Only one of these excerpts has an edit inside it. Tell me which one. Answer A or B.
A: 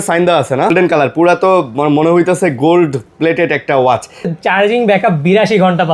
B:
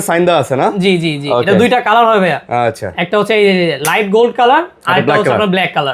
A